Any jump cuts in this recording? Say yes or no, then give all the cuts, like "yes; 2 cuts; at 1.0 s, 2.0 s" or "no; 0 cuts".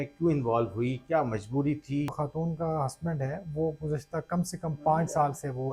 yes; 1 cut; at 2.1 s